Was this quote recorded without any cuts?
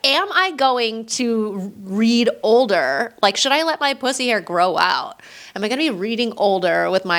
yes; 0 cuts

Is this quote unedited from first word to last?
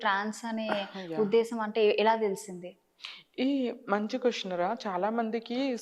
yes; 0 cuts

